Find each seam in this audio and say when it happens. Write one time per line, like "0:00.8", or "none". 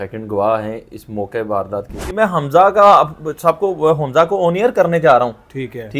0:02.0